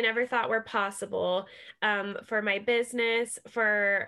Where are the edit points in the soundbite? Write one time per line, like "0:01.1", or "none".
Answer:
none